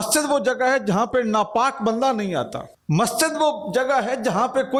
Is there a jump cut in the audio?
no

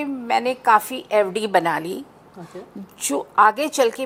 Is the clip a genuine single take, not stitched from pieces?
yes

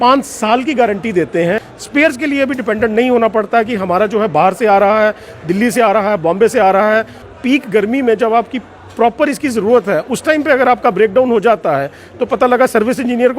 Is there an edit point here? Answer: yes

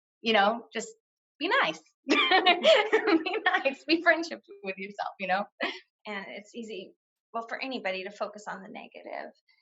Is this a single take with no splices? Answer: no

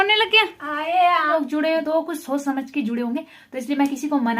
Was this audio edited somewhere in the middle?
yes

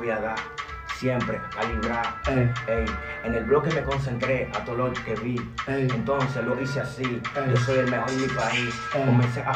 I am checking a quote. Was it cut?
no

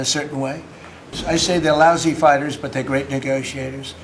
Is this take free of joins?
no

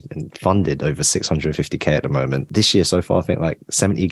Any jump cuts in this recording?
yes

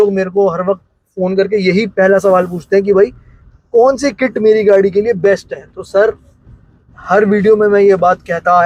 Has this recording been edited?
no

